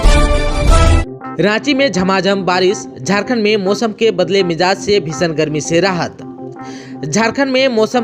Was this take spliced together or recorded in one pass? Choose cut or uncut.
cut